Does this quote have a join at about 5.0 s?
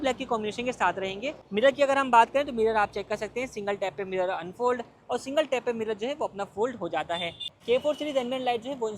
no; 2 cuts; at 1.4 s, 7.5 s

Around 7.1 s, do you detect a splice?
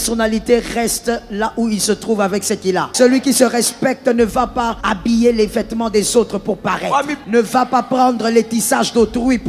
yes; 3 cuts; at 2.9 s, 4.8 s, 7.1 s

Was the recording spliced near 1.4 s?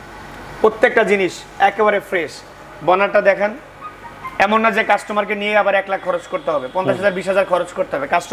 no; 0 cuts

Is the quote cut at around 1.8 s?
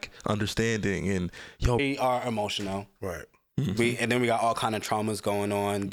yes; 1 cut; at 1.8 s

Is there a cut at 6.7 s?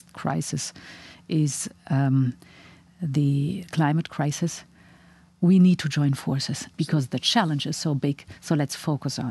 yes; 1 cut; at 6.7 s

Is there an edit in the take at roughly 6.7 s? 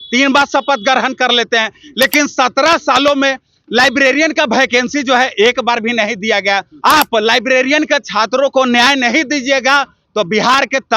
yes; 1 cut; at 6.7 s

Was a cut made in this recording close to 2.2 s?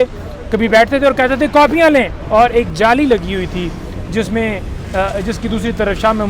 yes; 1 cut; at 2.2 s

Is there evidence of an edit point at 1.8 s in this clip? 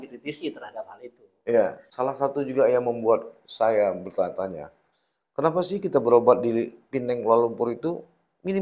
yes; 1 cut; at 1.8 s

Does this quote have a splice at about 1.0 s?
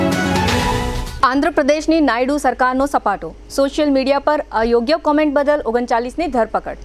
yes; 1 cut; at 1.0 s

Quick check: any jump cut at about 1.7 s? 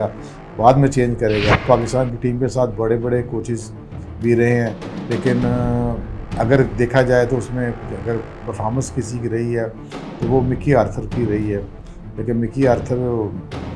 yes; 1 cut; at 1.7 s

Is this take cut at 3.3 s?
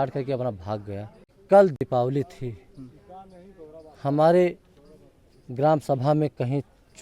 no; 1 cut; at 1.4 s

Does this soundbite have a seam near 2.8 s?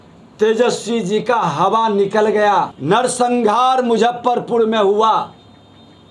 yes; 1 cut; at 2.8 s

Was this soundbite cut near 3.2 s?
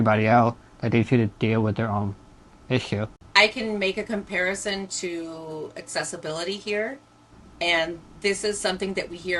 yes; 1 cut; at 3.2 s

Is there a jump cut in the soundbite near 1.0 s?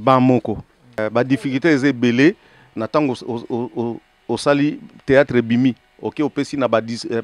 yes; 1 cut; at 1.0 s

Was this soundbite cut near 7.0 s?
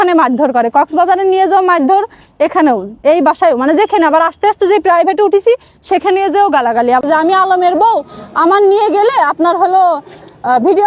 yes; 1 cut; at 7.0 s

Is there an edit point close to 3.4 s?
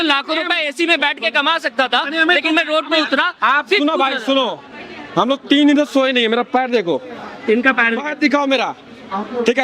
no; 0 cuts

